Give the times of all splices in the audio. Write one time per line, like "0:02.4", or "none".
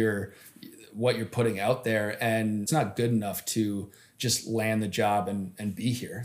0:02.7